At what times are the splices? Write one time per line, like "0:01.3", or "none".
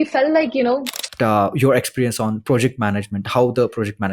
0:01.1

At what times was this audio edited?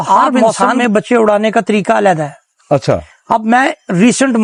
none

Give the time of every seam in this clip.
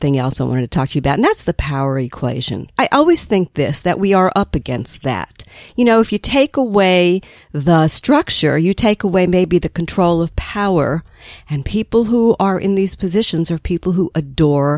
0:02.6

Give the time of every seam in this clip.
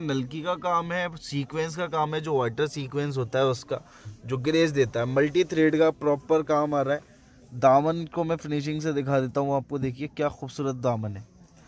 none

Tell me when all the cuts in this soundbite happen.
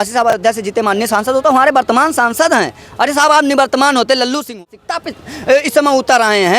0:04.5

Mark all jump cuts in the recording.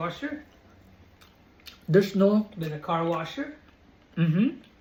none

